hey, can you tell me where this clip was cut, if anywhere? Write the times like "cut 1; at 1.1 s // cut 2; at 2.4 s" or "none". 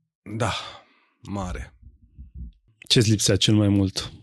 cut 1; at 2.8 s